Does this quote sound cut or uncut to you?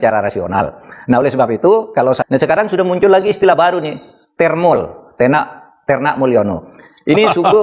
cut